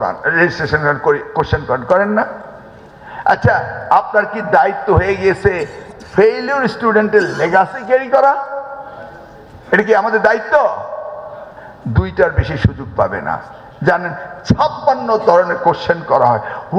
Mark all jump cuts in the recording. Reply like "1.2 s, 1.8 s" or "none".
none